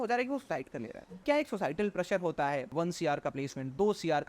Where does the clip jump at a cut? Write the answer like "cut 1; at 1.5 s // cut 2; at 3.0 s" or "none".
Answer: cut 1; at 1.2 s // cut 2; at 2.7 s